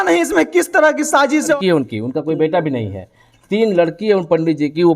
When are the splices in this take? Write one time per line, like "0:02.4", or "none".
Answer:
0:01.5